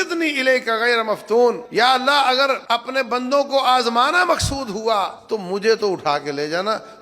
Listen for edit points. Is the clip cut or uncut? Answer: cut